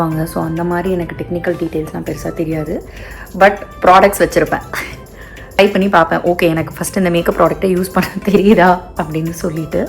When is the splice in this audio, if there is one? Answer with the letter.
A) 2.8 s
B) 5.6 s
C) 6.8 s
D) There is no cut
B